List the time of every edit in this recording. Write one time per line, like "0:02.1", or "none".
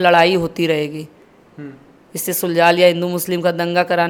none